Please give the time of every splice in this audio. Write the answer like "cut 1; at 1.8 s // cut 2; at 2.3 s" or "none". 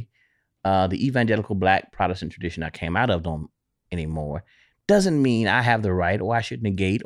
none